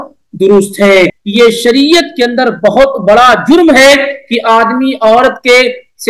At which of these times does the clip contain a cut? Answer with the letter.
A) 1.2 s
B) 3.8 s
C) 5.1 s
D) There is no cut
A